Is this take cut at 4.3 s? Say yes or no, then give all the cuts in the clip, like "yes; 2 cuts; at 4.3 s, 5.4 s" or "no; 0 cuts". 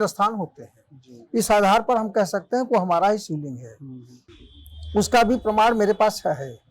yes; 1 cut; at 4.3 s